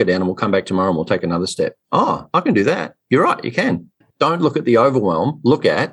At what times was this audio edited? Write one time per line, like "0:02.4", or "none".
0:03.9